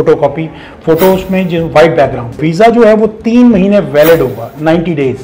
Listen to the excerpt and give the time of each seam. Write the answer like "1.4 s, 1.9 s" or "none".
2.3 s